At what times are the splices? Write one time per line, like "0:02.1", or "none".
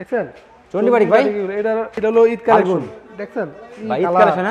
0:01.9